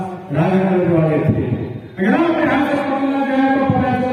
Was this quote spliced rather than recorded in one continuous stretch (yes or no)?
no